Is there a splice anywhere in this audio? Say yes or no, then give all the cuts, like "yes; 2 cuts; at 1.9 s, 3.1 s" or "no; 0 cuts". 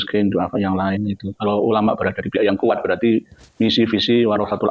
no; 0 cuts